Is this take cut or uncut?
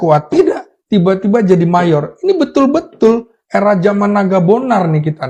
uncut